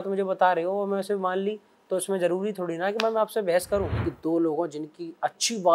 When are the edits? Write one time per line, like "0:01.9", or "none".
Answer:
0:03.9